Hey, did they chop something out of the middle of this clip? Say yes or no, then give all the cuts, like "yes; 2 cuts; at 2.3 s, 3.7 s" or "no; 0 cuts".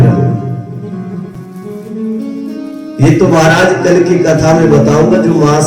yes; 1 cut; at 1.4 s